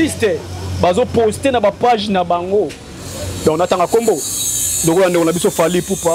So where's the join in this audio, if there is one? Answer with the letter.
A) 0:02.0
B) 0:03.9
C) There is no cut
C